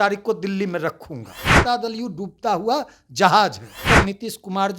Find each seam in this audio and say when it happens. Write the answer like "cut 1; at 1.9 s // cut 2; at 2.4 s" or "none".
cut 1; at 1.6 s // cut 2; at 3.8 s

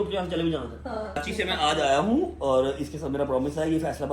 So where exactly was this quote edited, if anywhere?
cut 1; at 1.2 s

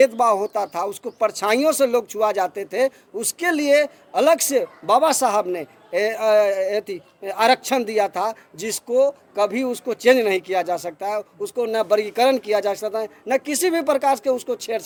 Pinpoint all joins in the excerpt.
none

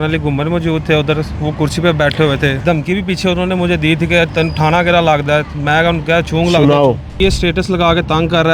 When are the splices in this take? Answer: cut 1; at 2.6 s // cut 2; at 7.2 s

